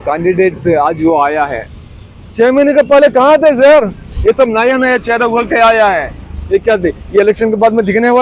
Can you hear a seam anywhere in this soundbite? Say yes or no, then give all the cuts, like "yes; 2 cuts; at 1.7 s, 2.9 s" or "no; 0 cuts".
no; 0 cuts